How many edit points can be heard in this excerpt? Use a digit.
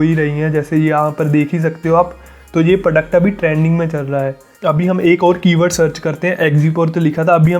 0